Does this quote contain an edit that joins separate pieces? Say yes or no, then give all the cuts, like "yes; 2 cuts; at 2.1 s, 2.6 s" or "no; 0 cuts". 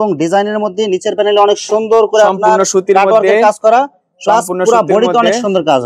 no; 0 cuts